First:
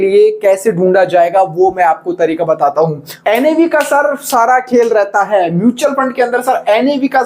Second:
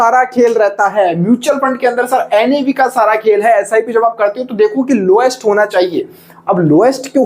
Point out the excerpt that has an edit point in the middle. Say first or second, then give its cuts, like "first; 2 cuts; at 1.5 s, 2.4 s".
first; 1 cut; at 3.1 s